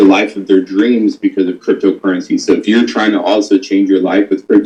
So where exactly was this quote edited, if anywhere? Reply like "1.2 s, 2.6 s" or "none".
none